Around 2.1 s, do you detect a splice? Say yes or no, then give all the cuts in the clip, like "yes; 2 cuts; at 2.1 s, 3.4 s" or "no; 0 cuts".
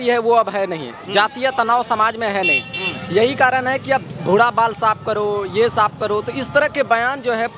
no; 0 cuts